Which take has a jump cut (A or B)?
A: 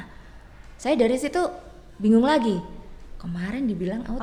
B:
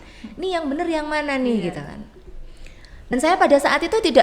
B